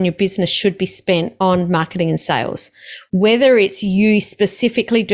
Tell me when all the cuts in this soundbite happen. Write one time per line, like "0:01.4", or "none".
0:01.3